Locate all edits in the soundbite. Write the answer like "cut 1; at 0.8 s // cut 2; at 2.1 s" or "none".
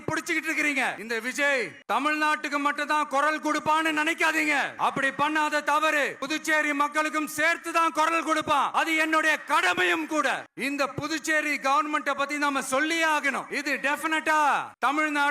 cut 1; at 1.5 s // cut 2; at 4.7 s // cut 3; at 6.2 s // cut 4; at 8.7 s // cut 5; at 10.5 s // cut 6; at 13.5 s